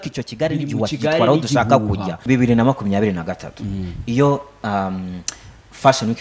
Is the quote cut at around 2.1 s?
yes; 1 cut; at 2.1 s

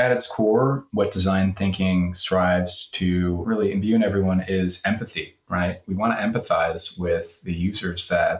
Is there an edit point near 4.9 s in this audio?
no; 2 cuts; at 0.9 s, 3.4 s

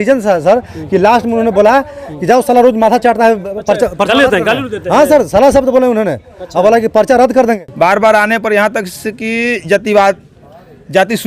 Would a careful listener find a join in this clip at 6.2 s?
no; 1 cut; at 7.6 s

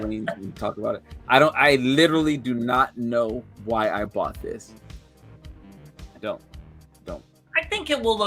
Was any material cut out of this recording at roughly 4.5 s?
no; 0 cuts

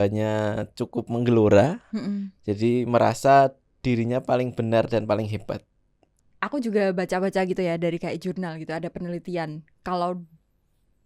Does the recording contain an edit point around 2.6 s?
no; 1 cut; at 6.2 s

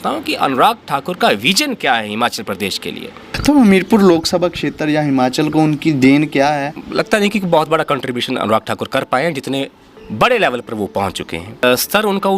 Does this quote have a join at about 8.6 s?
no; 3 cuts; at 3.3 s, 6.8 s, 11.6 s

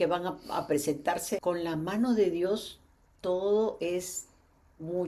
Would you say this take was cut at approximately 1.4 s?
yes; 1 cut; at 1.4 s

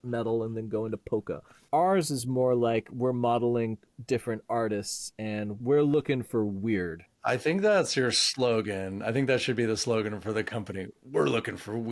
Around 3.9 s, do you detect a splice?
yes; 4 cuts; at 1.6 s, 3.9 s, 5.5 s, 7.2 s

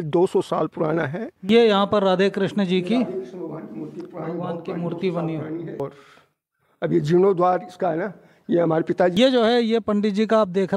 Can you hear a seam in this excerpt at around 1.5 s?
yes; 3 cuts; at 1.5 s, 5.8 s, 9.1 s

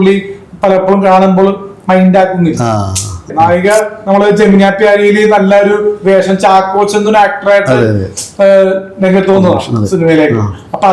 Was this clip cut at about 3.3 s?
yes; 1 cut; at 3.3 s

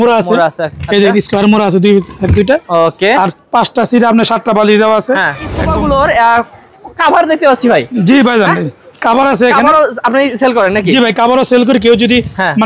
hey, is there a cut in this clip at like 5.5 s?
yes; 1 cut; at 5.5 s

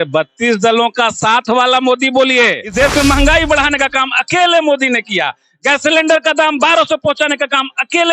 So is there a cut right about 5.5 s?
no; 1 cut; at 2.6 s

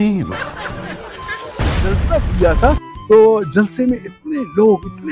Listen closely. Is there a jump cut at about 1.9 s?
yes; 1 cut; at 1.9 s

